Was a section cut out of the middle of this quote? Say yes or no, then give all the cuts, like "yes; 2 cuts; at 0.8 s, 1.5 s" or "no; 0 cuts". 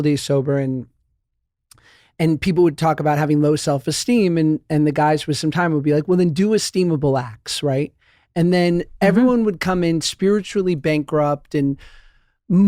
no; 0 cuts